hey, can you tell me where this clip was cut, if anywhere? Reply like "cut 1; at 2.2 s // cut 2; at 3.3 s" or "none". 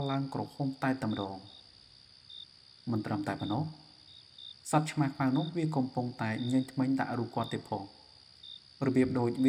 none

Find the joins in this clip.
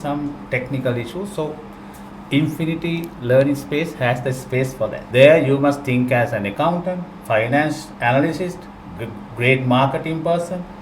cut 1; at 5.0 s

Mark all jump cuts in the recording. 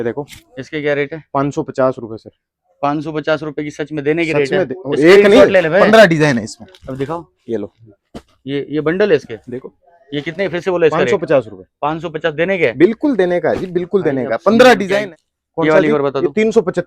cut 1; at 14.9 s

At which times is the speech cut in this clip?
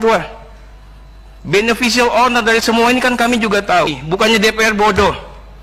cut 1; at 4.0 s

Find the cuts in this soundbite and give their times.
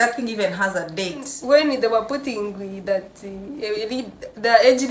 cut 1; at 1.3 s

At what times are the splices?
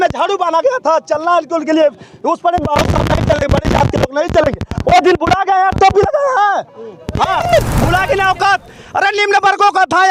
cut 1; at 7.4 s

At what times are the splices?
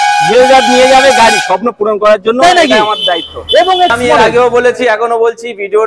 cut 1; at 3.9 s

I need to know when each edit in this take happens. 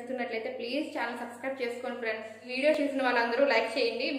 cut 1; at 2.7 s

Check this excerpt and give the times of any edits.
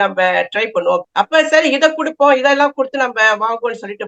cut 1; at 1.1 s

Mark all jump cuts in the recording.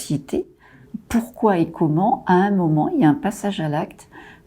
cut 1; at 0.9 s

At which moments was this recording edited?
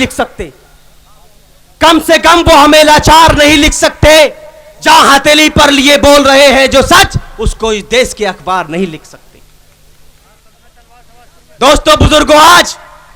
cut 1; at 10.7 s

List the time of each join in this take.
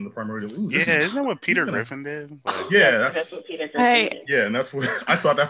none

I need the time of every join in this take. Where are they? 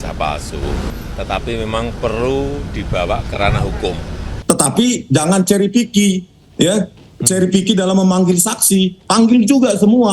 cut 1; at 1.0 s // cut 2; at 4.3 s

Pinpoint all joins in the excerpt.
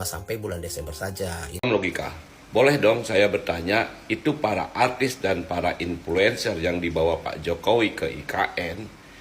cut 1; at 1.6 s

